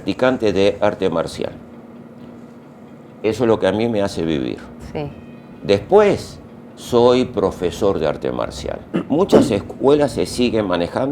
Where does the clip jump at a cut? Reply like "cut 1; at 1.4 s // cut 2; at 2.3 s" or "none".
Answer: cut 1; at 5.5 s // cut 2; at 8.8 s